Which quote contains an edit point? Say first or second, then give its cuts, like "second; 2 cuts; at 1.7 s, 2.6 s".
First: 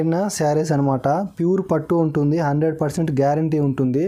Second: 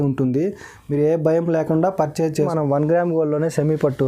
second; 1 cut; at 2.4 s